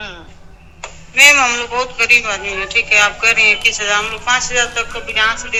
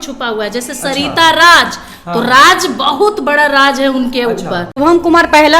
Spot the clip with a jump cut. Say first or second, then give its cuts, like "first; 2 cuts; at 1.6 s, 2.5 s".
second; 1 cut; at 4.7 s